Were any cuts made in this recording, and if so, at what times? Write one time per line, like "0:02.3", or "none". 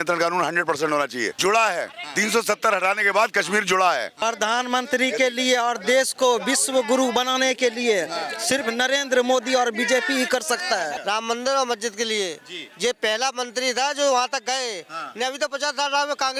0:01.4
0:04.2
0:11.0

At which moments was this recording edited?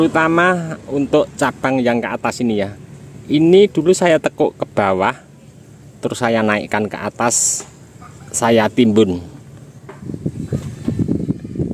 0:10.1

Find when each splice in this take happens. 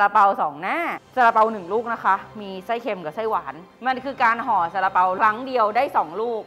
0:01.0
0:03.6
0:05.2

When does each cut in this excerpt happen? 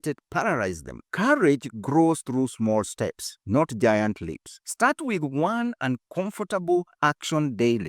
none

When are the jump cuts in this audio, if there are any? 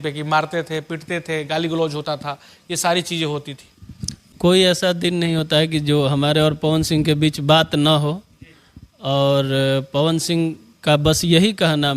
0:04.2

